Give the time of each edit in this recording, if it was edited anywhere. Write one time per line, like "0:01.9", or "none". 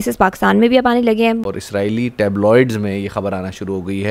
0:01.4

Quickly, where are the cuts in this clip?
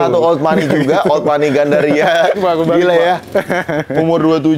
0:02.4

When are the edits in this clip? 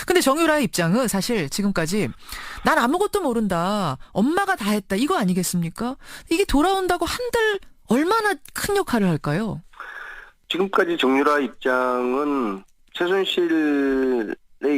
0:06.5

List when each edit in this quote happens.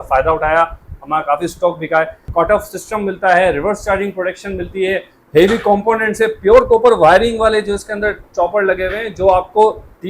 0:02.2

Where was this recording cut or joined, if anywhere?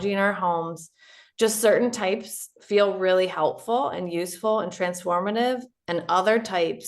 none

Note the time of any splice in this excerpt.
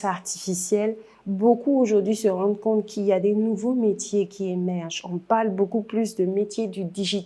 none

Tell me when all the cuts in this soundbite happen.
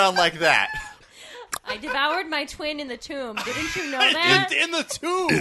0:01.0

